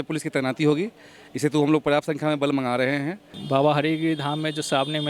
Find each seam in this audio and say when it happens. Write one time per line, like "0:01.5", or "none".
0:03.4